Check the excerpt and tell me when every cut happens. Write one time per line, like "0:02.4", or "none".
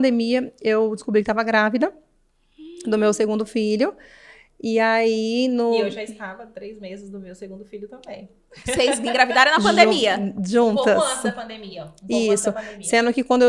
none